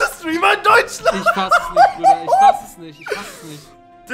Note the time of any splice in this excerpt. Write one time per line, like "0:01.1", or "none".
none